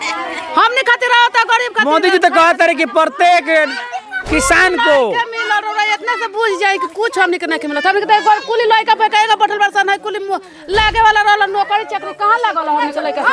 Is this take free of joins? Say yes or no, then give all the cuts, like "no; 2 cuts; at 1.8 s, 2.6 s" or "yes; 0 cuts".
yes; 0 cuts